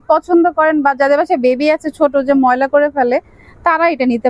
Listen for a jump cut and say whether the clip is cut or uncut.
uncut